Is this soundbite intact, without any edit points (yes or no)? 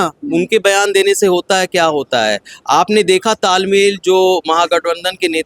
yes